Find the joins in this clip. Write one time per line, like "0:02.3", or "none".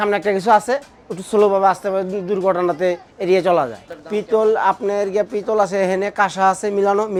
none